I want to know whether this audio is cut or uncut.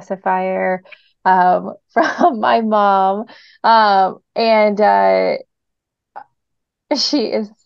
uncut